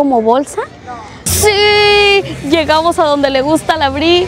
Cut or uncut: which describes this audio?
cut